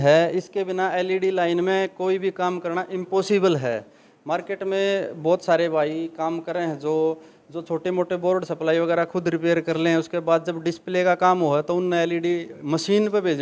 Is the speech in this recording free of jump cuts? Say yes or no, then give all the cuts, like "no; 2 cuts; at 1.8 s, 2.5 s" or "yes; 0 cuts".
yes; 0 cuts